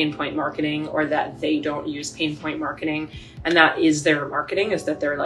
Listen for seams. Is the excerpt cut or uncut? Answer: uncut